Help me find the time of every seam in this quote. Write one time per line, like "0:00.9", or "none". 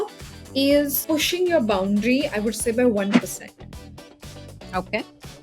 0:01.0